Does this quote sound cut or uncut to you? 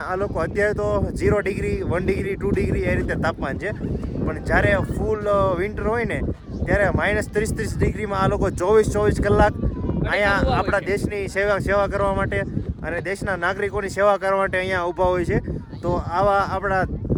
uncut